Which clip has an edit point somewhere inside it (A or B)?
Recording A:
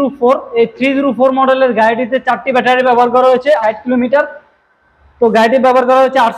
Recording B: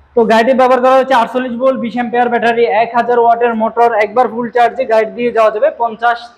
A